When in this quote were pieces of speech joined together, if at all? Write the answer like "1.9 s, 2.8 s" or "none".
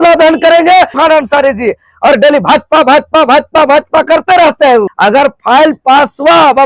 0.9 s, 4.9 s

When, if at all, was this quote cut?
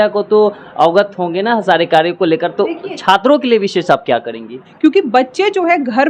4.6 s

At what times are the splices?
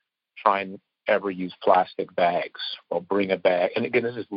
2.7 s

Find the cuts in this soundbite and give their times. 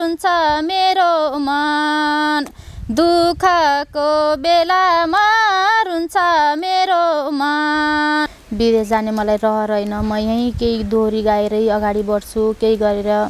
8.4 s

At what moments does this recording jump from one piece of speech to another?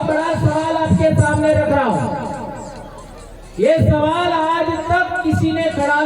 none

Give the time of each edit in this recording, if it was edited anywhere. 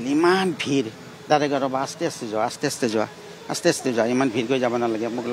none

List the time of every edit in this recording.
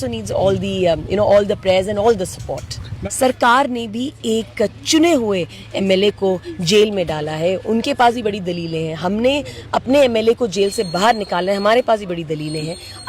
2.9 s

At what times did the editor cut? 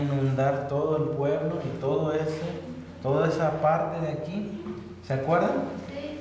3.8 s

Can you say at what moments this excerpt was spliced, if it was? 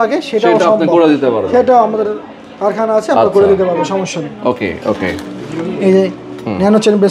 none

